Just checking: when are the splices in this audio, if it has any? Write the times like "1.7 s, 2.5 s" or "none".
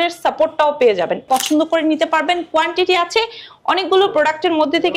1.3 s